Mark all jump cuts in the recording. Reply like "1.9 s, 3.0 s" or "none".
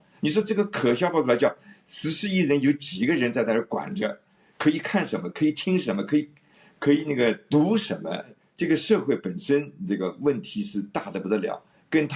8.4 s